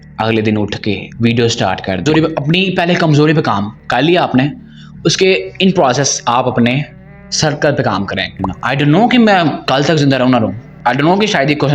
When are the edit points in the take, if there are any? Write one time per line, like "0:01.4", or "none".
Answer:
0:02.1
0:08.4